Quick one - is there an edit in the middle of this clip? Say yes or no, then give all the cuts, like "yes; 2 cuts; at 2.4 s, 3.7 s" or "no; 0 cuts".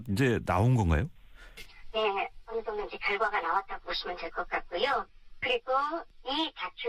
no; 0 cuts